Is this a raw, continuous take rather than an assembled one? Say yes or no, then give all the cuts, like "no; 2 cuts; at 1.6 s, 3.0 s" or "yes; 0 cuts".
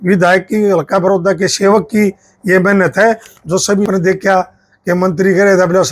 no; 1 cut; at 3.9 s